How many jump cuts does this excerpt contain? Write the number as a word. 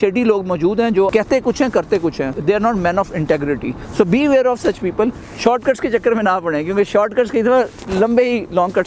four